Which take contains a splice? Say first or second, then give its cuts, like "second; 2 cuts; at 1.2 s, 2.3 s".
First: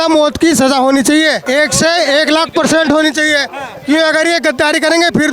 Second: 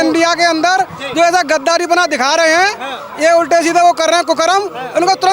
first; 1 cut; at 1.4 s